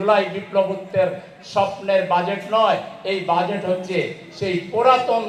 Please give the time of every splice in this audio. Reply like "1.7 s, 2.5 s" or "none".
none

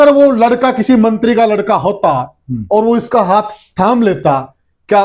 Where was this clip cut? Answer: none

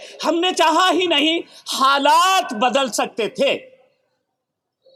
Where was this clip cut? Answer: none

